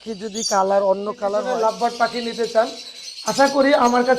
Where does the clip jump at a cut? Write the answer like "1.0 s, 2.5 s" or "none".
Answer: 1.4 s